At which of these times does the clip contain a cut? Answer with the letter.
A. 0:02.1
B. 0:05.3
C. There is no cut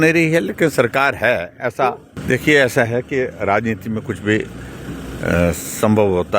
A